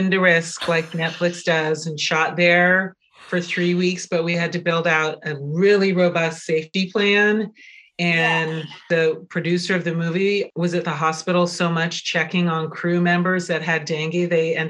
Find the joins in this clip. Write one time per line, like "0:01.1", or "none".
0:06.7